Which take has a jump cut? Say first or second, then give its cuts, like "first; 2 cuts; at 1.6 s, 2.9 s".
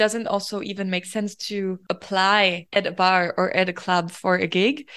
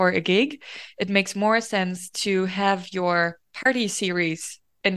first; 2 cuts; at 1.8 s, 2.6 s